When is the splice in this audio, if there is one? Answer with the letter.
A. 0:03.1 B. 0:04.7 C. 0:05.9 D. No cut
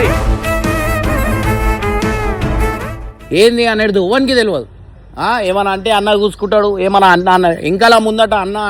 A